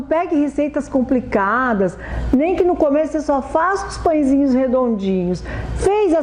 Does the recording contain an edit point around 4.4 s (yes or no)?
no